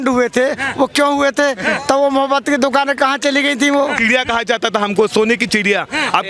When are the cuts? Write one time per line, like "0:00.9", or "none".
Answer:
0:04.0